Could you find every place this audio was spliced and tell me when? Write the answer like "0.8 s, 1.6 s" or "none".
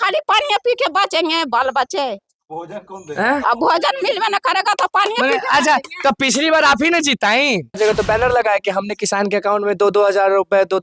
7.8 s